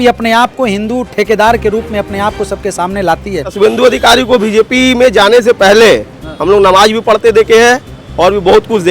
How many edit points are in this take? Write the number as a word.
one